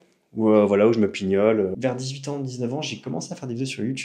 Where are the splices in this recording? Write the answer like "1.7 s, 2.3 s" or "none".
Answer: 1.8 s